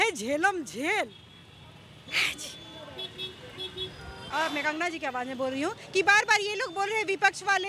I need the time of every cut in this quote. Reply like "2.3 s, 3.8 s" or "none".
4.1 s